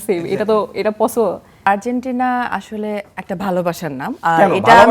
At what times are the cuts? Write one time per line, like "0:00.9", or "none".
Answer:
0:01.6